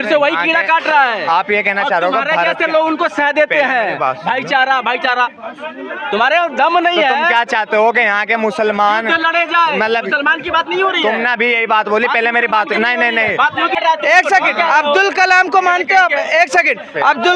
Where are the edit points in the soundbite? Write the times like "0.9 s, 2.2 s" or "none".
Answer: 13.8 s